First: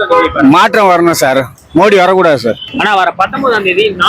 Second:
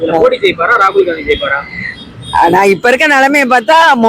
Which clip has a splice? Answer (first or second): first